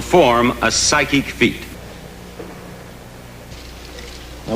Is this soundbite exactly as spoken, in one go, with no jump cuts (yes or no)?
no